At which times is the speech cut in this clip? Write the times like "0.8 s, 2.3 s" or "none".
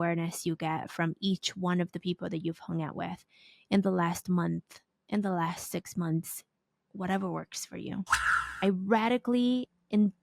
8.2 s